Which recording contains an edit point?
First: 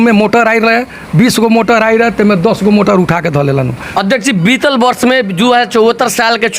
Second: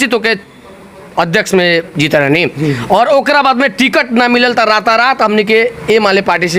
first; 1 cut; at 4.0 s

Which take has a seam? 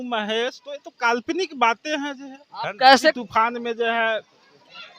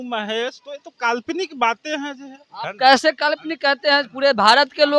first; 1 cut; at 3.2 s

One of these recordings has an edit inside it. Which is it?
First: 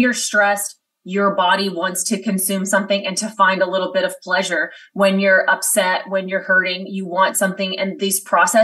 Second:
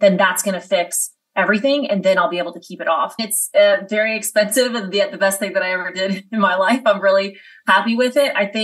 second; 1 cut; at 3.3 s

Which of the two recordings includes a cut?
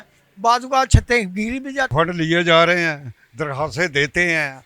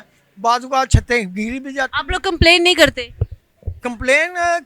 first; 1 cut; at 1.9 s

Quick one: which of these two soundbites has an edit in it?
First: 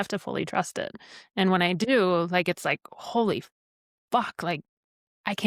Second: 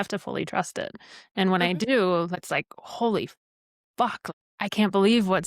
second; 2 cuts; at 2.4 s, 4.2 s

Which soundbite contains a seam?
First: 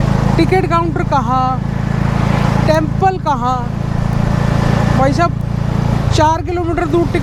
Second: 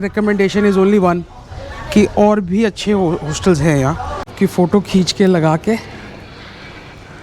second; 1 cut; at 4.2 s

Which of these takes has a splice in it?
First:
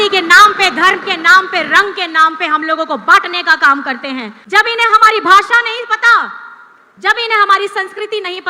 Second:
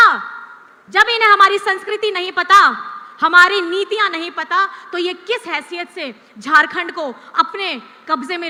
first; 1 cut; at 4.4 s

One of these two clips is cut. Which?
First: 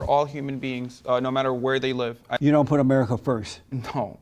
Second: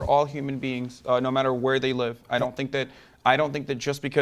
first; 1 cut; at 2.3 s

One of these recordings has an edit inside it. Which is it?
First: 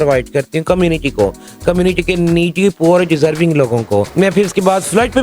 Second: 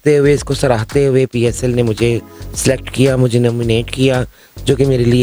first; 1 cut; at 4.1 s

